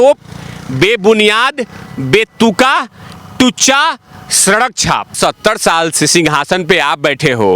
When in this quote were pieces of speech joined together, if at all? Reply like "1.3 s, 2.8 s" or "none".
5.1 s